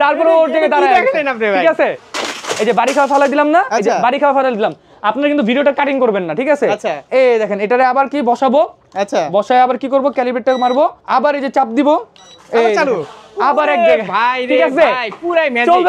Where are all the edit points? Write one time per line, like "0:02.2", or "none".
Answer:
0:02.1
0:11.0